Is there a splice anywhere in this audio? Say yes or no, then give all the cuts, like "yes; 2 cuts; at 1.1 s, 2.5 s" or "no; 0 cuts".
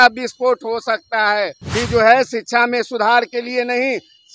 yes; 1 cut; at 1.6 s